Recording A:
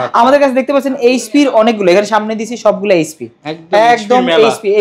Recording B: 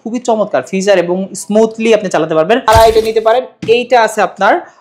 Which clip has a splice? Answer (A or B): B